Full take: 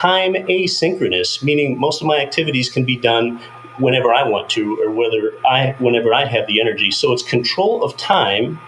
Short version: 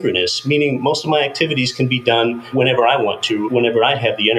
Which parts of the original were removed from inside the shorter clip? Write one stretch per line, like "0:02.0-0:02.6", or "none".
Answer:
0:03.4-0:03.7
0:04.7-0:05.8